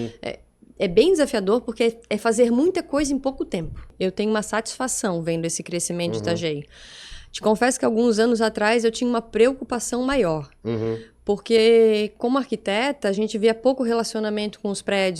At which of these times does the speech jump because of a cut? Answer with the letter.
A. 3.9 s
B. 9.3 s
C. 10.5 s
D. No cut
A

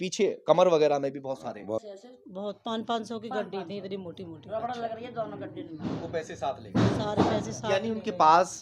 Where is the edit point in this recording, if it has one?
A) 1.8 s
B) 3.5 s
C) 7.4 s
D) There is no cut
A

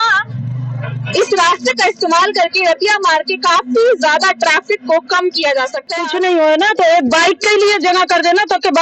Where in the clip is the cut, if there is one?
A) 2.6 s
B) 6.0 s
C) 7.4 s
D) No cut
B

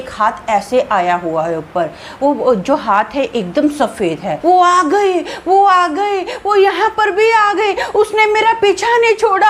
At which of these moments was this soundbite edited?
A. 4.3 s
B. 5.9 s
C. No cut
A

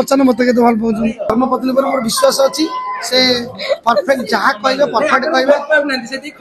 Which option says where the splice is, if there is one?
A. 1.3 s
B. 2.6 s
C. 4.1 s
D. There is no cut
A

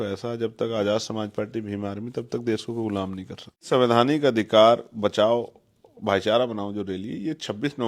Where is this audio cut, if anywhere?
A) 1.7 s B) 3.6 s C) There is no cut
B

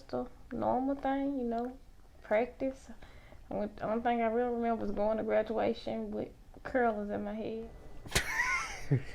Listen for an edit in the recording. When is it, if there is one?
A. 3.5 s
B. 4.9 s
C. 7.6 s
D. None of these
C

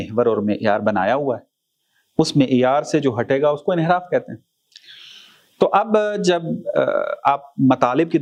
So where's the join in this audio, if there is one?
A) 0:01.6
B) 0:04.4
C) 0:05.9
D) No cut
D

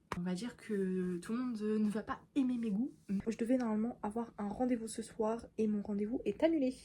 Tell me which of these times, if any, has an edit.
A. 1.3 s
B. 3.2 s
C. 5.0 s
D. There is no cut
B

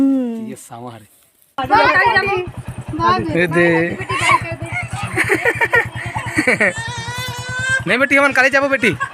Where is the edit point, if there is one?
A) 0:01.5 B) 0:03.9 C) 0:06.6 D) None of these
A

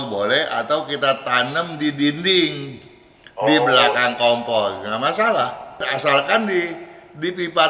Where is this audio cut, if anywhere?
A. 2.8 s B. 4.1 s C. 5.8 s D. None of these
C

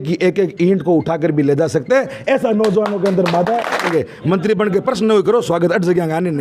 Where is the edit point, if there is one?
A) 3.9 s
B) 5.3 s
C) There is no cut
A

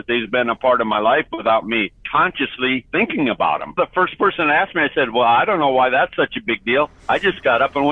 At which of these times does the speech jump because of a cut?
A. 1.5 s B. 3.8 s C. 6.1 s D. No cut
B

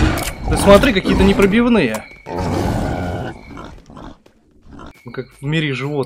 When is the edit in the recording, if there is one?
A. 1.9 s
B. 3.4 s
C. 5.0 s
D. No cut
C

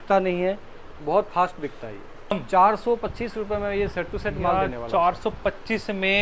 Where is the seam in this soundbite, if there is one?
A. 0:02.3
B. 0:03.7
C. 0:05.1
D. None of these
A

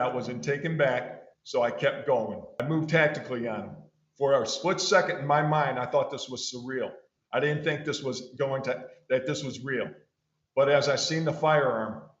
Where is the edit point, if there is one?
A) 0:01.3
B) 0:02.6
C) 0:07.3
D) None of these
B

